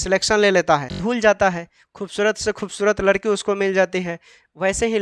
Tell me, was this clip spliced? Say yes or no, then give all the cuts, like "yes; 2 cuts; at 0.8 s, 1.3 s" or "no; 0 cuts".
yes; 1 cut; at 0.9 s